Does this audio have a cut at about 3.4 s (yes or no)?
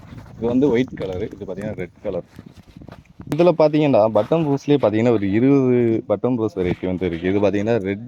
yes